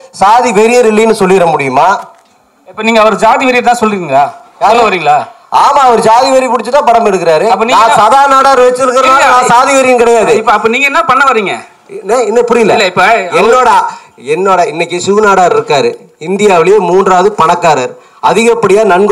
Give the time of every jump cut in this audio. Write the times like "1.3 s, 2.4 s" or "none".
none